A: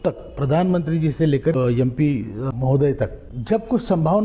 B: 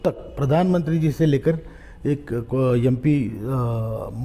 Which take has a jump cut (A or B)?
A